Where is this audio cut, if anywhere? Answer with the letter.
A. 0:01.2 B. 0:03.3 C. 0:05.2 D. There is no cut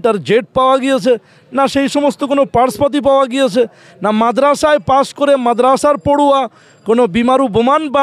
D